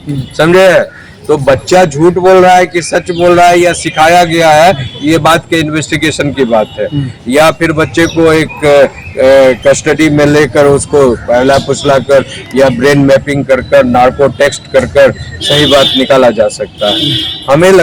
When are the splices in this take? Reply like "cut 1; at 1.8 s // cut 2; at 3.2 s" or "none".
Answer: none